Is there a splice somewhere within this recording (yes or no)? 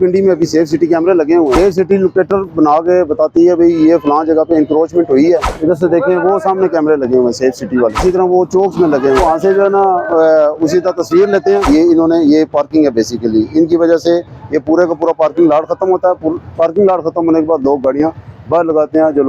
yes